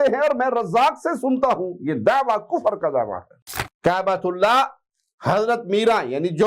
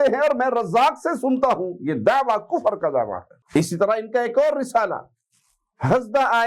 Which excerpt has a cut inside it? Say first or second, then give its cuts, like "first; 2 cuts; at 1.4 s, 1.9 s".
first; 1 cut; at 3.3 s